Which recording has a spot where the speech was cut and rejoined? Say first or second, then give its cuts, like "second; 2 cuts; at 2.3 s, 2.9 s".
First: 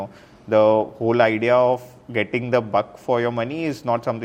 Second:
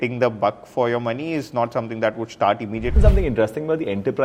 second; 1 cut; at 3.0 s